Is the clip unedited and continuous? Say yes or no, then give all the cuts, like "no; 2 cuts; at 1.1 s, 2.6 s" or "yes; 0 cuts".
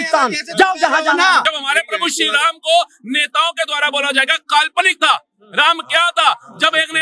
no; 1 cut; at 1.5 s